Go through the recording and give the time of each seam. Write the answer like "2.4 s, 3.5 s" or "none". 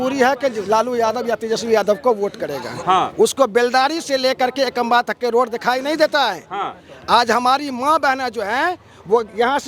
none

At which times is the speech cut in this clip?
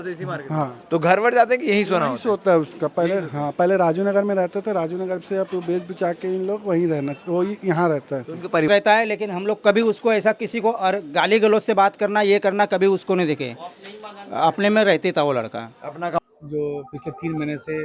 8.7 s, 16.2 s

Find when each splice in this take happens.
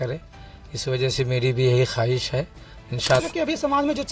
3.2 s

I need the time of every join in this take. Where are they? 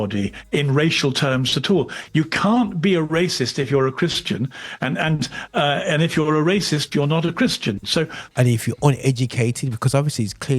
8.2 s

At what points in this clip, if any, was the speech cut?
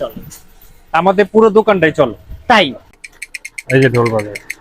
2.8 s

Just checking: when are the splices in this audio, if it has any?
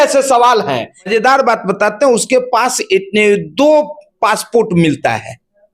1.1 s

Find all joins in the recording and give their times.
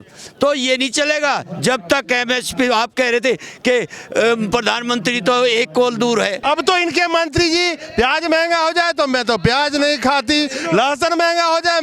6.4 s

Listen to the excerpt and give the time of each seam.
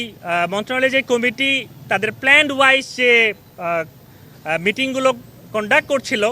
none

